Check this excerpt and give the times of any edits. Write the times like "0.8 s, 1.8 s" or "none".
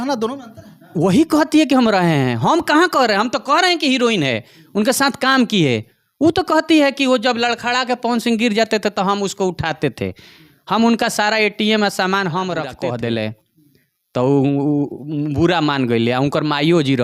12.7 s